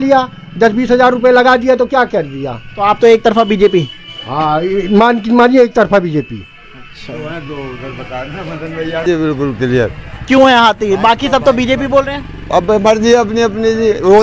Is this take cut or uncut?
uncut